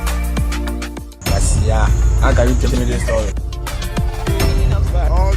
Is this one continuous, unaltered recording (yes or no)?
yes